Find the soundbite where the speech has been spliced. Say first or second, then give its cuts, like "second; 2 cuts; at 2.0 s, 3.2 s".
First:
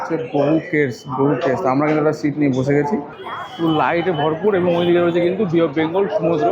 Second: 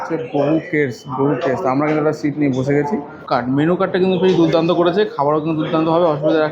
first; 1 cut; at 3.1 s